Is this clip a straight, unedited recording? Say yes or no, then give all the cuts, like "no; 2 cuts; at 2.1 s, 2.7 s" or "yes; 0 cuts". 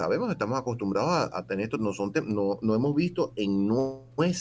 yes; 0 cuts